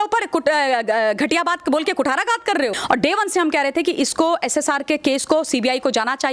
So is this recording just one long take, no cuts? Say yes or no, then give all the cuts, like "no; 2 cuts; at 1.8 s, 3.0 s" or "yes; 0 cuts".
no; 1 cut; at 2.8 s